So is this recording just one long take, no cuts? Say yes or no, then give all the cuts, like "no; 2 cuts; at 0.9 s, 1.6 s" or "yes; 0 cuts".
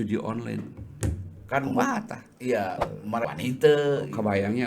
no; 1 cut; at 3.2 s